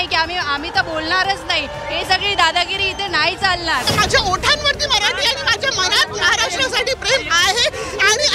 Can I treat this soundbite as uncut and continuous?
yes; 0 cuts

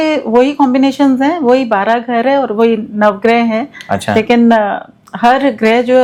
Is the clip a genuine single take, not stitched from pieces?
yes; 0 cuts

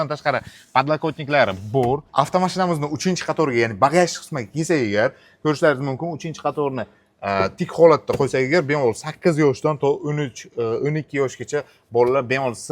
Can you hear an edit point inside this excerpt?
yes; 1 cut; at 2.1 s

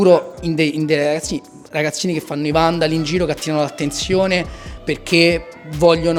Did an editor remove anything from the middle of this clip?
no; 0 cuts

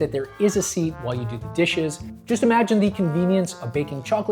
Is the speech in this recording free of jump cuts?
no; 1 cut; at 2.1 s

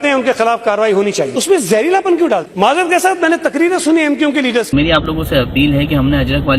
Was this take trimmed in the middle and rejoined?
yes; 2 cuts; at 1.4 s, 4.7 s

